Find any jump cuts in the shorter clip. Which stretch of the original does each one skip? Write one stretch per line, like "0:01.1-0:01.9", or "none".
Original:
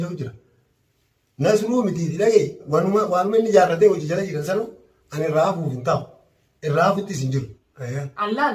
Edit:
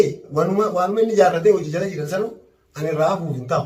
none